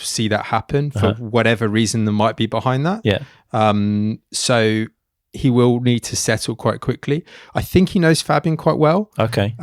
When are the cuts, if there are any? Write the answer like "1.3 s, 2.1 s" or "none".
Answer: none